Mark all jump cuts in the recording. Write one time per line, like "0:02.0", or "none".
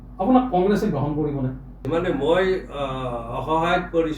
0:01.8